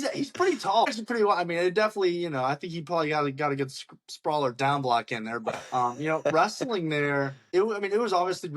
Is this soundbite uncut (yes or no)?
no